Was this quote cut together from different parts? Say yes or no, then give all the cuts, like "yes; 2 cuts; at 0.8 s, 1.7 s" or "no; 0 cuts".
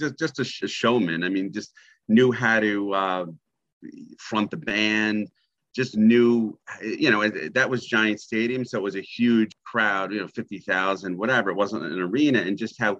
yes; 1 cut; at 9.5 s